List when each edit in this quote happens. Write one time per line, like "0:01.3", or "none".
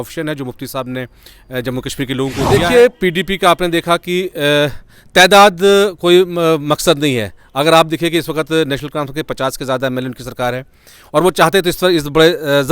0:02.5

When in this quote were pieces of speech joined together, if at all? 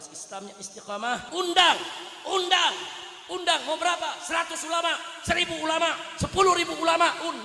0:01.3

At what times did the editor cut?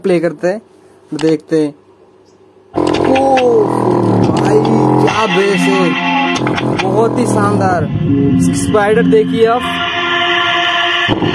none

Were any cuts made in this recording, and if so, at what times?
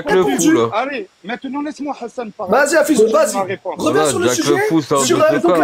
none

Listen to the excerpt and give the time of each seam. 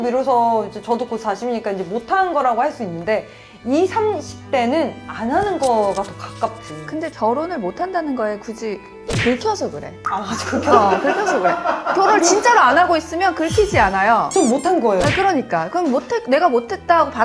none

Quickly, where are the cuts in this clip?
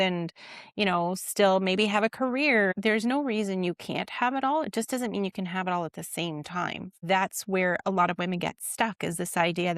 0:02.7
0:06.9

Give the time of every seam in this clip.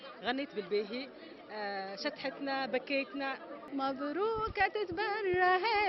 0:03.5

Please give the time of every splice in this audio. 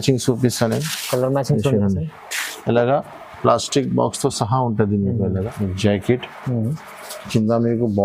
0:05.5

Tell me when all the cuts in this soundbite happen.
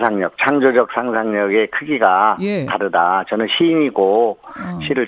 0:01.7

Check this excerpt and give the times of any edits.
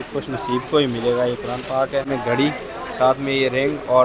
0:02.1

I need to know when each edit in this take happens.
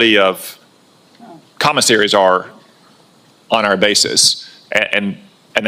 none

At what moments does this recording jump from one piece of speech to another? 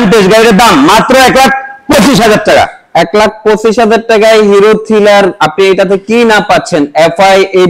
none

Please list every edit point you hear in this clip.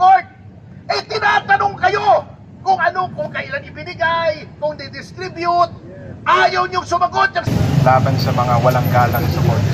0:07.5

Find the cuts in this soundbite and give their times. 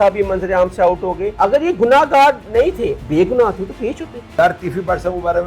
0:01.3
0:03.0
0:04.2

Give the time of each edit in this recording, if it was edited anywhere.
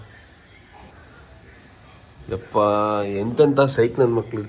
0:00.9

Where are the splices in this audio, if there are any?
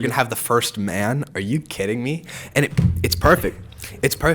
none

